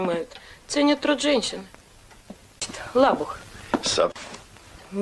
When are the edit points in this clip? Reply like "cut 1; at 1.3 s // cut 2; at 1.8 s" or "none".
none